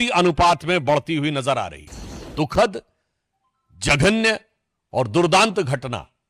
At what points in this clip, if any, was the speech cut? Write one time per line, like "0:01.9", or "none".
0:02.2